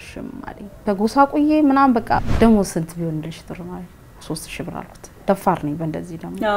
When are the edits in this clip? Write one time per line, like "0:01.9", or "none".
0:02.2